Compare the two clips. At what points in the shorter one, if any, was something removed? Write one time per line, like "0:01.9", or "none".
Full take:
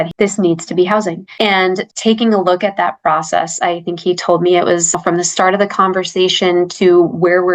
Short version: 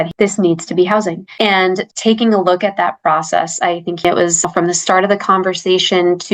0:04.0